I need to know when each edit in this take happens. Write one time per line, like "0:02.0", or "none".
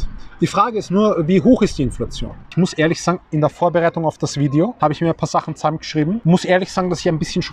0:02.5
0:04.7
0:06.2